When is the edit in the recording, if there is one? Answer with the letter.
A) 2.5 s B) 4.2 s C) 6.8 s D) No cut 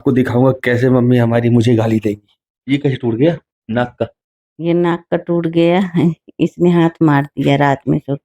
A